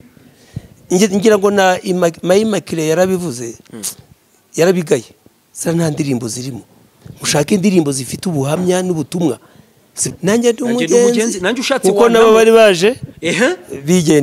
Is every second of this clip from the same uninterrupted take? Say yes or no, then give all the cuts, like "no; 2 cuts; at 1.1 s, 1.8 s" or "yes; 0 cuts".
no; 1 cut; at 10.0 s